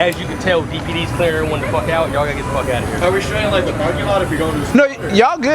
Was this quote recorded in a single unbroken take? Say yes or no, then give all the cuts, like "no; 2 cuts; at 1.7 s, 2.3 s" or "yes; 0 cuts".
no; 1 cut; at 3.0 s